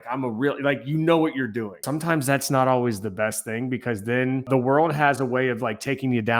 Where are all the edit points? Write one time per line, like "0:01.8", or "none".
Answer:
0:01.8
0:04.5